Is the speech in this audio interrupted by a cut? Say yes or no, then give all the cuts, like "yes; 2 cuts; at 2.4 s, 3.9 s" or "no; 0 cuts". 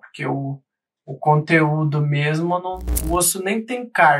yes; 1 cut; at 3.3 s